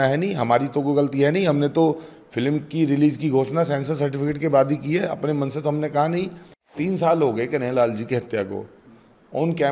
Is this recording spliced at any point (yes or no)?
yes